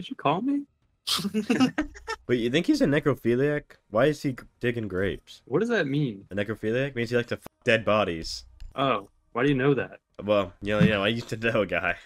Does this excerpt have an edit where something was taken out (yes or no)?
yes